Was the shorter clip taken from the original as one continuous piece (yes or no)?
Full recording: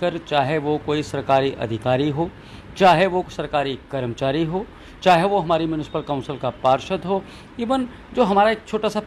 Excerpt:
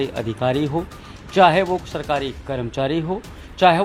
yes